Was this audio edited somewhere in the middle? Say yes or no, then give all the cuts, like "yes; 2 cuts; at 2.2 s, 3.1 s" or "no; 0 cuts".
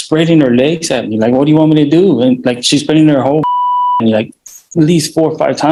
no; 0 cuts